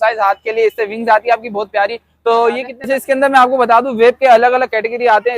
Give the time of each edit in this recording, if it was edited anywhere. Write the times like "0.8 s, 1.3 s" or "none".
2.7 s